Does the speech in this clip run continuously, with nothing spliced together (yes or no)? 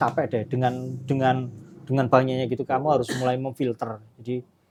yes